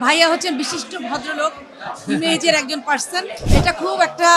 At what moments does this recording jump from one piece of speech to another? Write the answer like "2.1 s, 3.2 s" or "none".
3.4 s

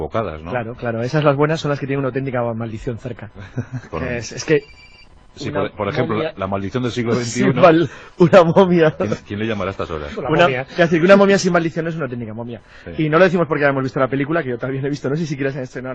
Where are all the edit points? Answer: 5.9 s

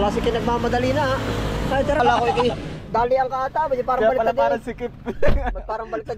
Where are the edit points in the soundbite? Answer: 2.0 s

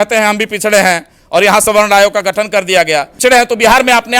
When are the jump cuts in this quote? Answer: 3.1 s

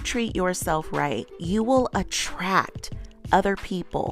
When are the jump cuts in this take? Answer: 1.3 s

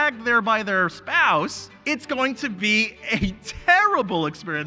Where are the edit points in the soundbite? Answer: 1.7 s

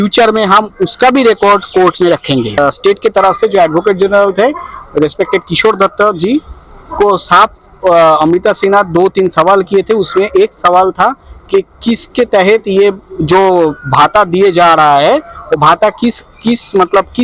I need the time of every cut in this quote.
2.6 s

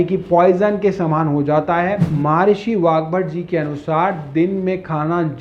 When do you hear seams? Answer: 2.1 s

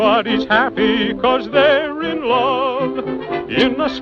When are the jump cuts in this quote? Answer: 3.1 s

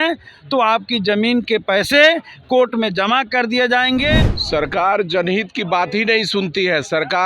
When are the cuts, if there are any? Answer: 4.3 s

